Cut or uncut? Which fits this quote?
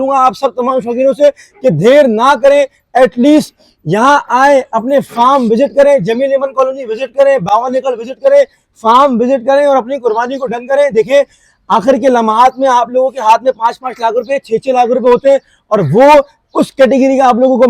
uncut